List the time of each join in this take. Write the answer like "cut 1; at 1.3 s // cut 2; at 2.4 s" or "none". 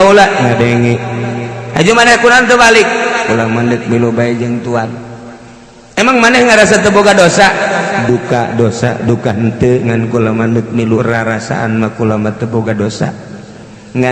none